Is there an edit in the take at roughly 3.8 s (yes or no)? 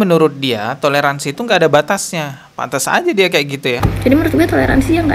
yes